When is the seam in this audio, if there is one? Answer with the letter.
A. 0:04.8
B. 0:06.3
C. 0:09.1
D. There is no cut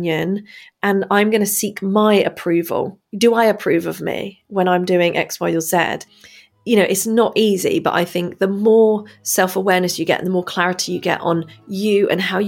B